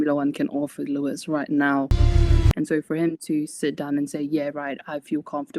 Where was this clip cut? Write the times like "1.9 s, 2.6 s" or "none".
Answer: 2.3 s

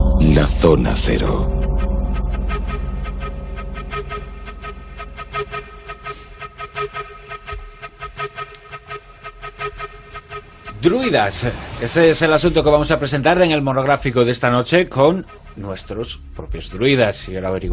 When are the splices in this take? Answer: none

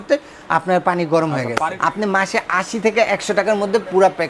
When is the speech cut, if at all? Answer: 1.8 s

